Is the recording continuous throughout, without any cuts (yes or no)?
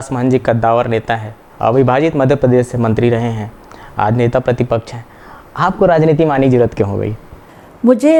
yes